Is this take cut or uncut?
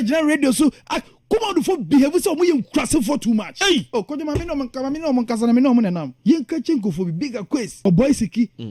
cut